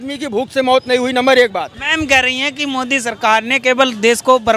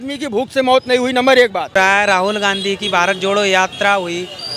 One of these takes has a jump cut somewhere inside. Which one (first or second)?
first